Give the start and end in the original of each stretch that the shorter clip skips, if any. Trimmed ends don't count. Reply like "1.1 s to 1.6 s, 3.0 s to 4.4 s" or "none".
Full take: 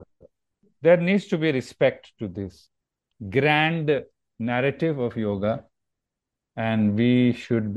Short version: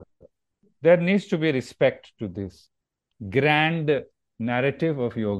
none